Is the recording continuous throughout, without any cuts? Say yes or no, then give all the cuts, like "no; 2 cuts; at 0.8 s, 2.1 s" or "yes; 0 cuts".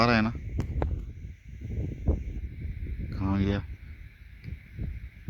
yes; 0 cuts